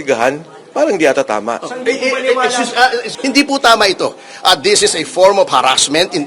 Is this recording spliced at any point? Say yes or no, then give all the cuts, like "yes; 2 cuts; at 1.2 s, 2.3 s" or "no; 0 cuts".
yes; 1 cut; at 3.1 s